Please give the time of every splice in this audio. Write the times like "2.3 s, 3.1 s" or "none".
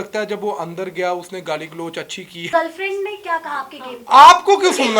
2.5 s